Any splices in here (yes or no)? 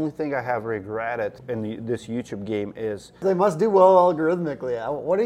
yes